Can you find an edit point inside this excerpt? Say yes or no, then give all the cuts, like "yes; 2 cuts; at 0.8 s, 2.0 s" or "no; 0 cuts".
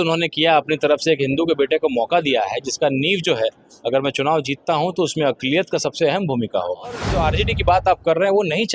yes; 1 cut; at 7.1 s